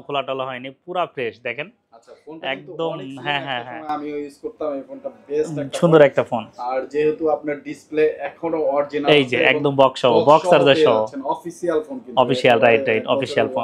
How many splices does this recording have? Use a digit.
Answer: 0